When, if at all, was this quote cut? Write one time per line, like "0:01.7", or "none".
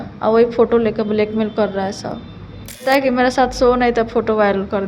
0:02.8